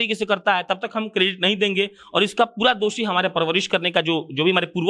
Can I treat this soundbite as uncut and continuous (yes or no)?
yes